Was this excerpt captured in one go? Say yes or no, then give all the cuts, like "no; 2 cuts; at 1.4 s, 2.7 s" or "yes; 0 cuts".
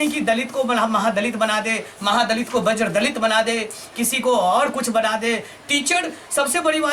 yes; 0 cuts